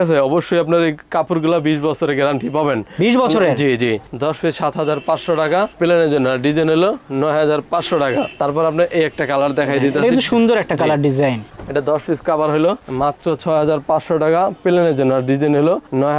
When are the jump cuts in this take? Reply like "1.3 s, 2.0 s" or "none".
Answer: none

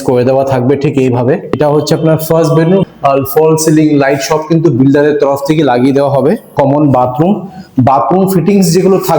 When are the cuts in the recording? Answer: 1.6 s, 2.9 s, 6.5 s

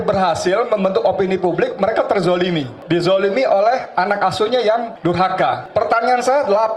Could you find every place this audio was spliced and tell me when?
2.7 s, 5.2 s

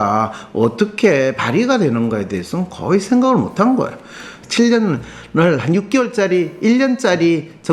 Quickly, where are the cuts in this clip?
4.3 s

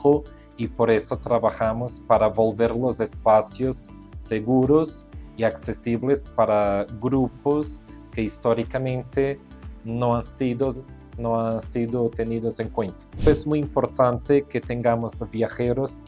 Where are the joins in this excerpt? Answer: 13.3 s

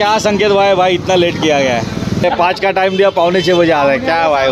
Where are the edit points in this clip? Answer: 2.2 s

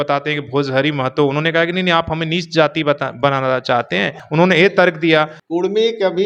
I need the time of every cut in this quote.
4.2 s, 5.4 s

